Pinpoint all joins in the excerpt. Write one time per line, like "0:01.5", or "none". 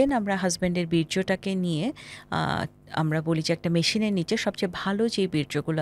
none